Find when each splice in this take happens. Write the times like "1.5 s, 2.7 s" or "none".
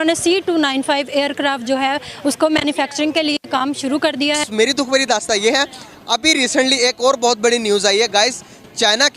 4.5 s